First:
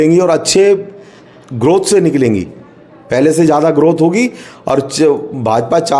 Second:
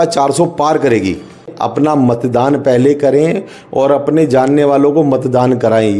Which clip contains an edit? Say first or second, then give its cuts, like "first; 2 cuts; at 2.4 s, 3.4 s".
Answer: second; 1 cut; at 1.5 s